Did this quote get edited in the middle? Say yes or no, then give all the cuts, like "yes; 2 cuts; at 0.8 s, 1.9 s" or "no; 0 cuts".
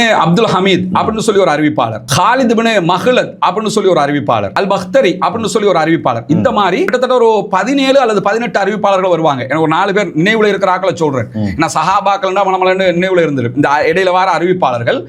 no; 0 cuts